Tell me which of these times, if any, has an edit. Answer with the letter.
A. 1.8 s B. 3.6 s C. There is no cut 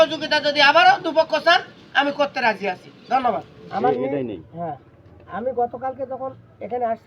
B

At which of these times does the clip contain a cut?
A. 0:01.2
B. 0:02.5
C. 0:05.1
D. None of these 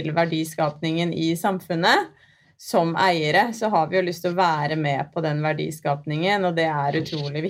B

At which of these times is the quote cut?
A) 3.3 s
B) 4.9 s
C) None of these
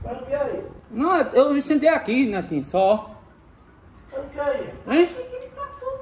C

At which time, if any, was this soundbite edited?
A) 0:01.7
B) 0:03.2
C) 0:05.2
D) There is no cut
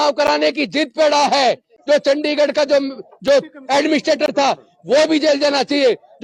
A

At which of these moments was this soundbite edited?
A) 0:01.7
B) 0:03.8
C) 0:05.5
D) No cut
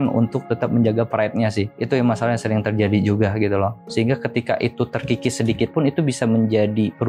B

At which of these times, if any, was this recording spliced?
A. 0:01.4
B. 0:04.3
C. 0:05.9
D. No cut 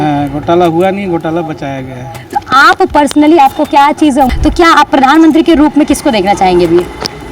B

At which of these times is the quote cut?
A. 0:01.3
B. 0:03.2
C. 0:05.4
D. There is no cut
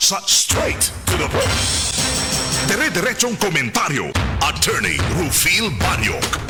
D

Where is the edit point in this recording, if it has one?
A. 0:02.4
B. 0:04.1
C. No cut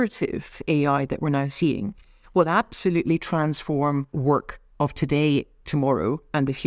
B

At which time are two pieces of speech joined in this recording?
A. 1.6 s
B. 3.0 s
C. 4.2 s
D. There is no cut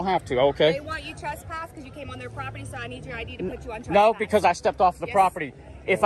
D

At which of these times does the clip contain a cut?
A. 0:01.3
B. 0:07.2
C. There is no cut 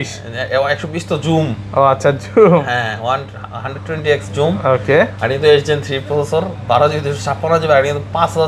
C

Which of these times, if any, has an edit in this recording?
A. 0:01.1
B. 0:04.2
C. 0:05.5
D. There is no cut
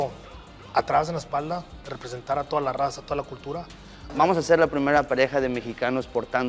B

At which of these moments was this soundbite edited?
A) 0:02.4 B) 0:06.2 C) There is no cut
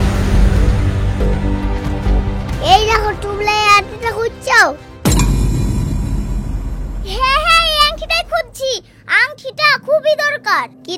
A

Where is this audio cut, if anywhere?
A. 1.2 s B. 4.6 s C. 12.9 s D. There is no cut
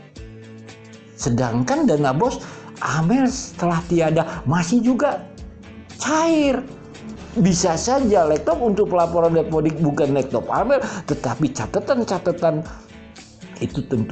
A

